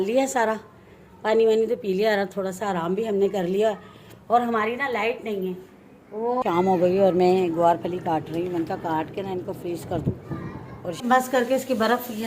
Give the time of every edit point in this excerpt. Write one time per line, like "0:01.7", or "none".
0:06.4
0:11.0